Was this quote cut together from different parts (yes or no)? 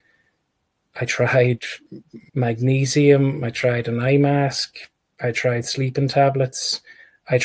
yes